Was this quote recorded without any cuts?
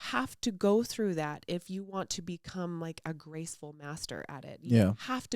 yes; 0 cuts

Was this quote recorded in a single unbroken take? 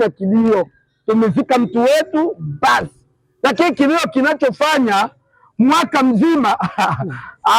yes; 0 cuts

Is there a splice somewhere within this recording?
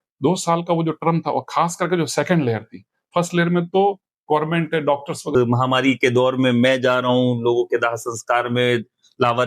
yes; 1 cut; at 5.4 s

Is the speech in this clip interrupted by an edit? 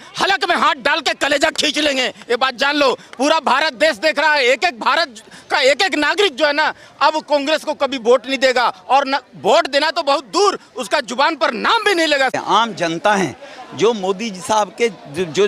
no; 0 cuts

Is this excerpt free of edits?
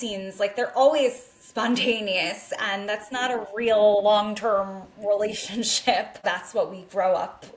no; 1 cut; at 6.2 s

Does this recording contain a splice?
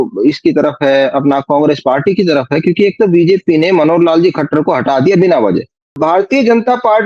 yes; 1 cut; at 5.9 s

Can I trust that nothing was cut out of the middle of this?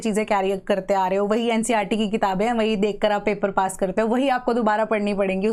yes; 0 cuts

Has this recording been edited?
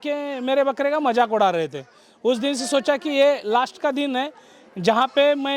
no; 0 cuts

